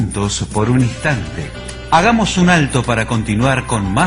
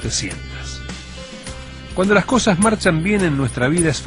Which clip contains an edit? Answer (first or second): second